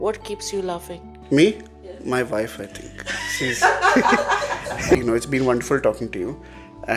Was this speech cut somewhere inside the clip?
no; 0 cuts

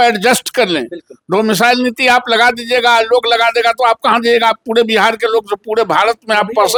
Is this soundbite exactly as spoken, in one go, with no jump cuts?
yes; 0 cuts

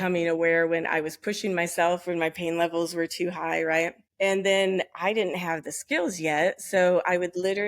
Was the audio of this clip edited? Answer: yes; 1 cut; at 4.0 s

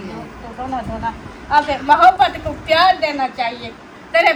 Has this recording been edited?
no; 0 cuts

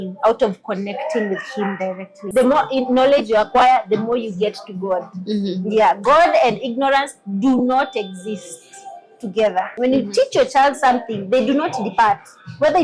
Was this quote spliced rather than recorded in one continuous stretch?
yes; 2 cuts; at 2.2 s, 9.7 s

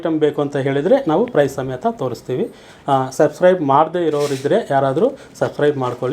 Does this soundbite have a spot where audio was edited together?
no; 0 cuts

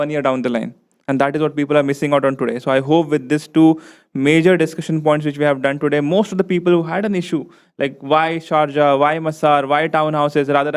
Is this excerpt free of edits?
yes; 0 cuts

